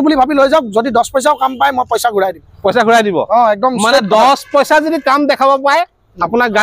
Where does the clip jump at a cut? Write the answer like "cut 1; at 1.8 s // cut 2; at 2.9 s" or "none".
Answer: none